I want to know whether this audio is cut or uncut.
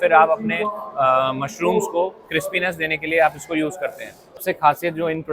cut